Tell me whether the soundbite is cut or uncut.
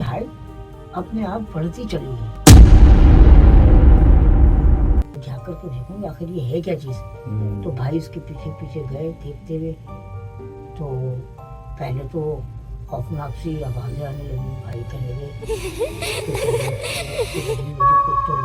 cut